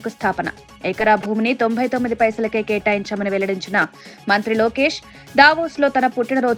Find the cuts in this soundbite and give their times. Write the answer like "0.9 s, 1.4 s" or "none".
none